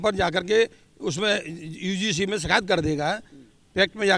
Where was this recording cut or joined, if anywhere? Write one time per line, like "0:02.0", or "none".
none